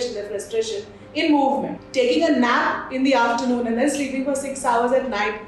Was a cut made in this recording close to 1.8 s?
yes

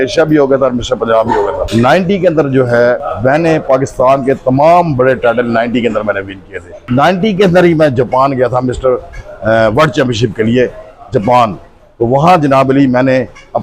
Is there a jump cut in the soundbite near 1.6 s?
yes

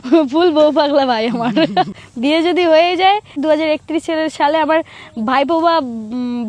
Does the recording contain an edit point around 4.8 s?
no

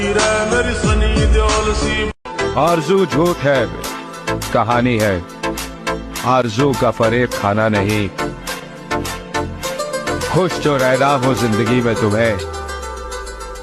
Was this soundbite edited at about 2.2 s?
yes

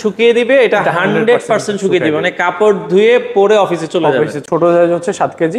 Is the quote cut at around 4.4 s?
yes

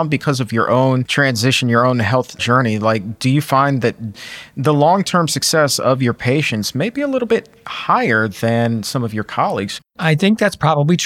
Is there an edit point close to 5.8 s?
no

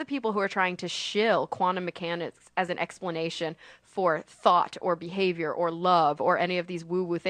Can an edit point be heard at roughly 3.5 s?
yes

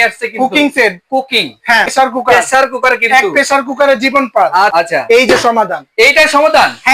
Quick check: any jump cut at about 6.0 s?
no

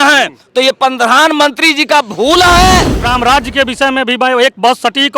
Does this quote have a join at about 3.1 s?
yes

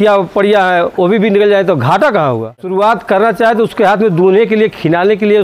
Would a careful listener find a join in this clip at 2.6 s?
yes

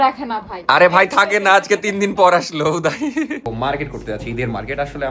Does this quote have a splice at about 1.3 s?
no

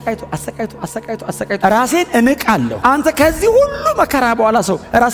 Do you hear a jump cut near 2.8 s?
yes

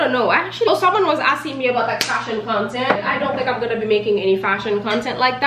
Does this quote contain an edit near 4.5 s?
no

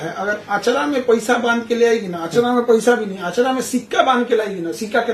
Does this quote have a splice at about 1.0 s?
no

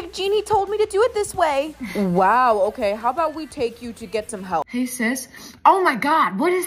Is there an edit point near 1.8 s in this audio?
no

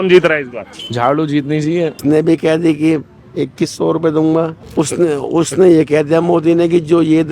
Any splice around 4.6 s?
yes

